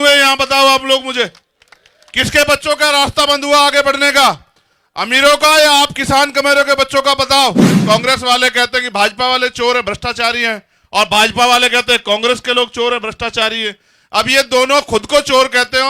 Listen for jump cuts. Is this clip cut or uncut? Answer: cut